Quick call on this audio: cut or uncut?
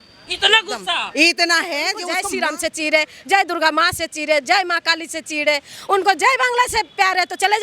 cut